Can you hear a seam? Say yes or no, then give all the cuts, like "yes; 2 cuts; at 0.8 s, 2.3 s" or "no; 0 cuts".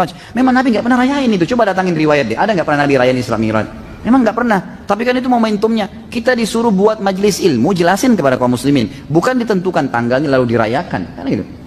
no; 0 cuts